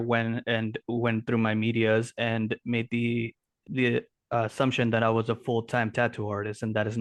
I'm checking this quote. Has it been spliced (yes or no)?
no